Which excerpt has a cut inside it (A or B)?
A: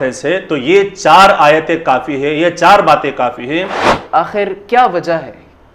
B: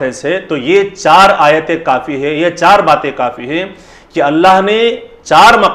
A